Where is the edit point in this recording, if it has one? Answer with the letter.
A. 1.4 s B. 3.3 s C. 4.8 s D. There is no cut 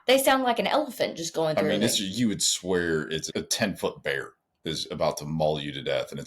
B